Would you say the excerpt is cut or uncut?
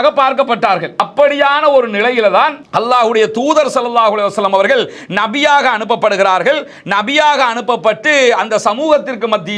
cut